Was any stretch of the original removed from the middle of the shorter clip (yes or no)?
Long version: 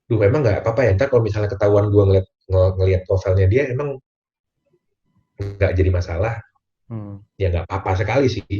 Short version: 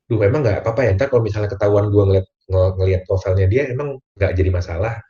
yes